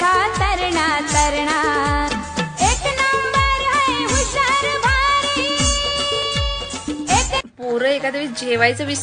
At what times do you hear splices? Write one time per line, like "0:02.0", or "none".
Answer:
none